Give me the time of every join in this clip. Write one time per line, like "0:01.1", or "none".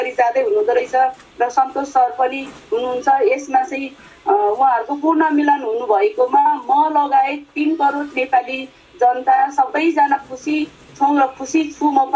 none